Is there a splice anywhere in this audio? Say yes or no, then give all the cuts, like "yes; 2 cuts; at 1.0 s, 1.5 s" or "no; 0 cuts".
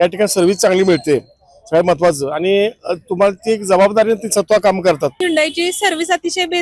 yes; 1 cut; at 5.2 s